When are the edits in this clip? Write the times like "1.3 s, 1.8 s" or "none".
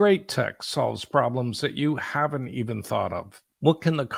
none